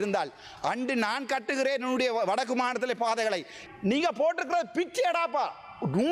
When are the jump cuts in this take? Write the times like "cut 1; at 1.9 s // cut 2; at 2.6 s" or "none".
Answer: cut 1; at 3.6 s